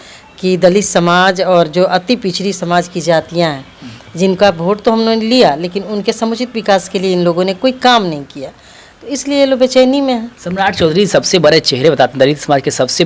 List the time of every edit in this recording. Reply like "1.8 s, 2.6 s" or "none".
none

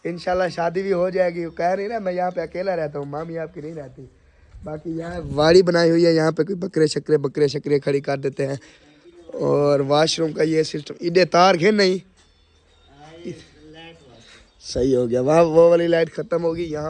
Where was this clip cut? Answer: none

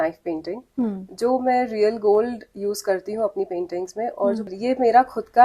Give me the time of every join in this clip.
4.5 s

